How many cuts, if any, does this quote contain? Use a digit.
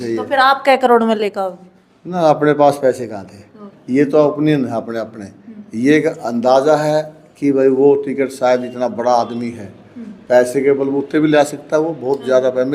1